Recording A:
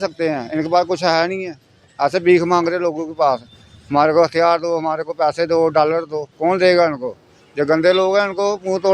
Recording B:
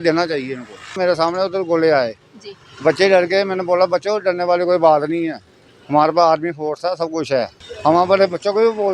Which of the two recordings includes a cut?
B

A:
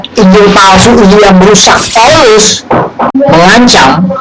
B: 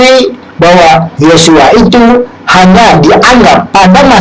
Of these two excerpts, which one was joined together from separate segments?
A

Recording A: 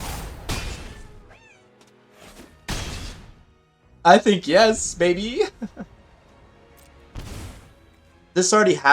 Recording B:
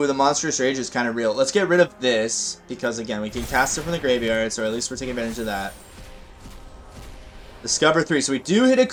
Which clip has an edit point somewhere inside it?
A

